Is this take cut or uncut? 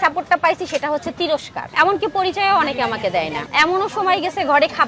cut